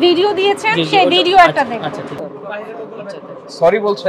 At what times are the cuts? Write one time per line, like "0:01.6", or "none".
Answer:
0:02.2